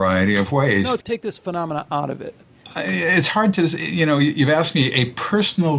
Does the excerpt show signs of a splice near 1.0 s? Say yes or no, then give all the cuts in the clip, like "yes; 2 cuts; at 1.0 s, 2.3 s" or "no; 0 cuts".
yes; 2 cuts; at 1.0 s, 2.6 s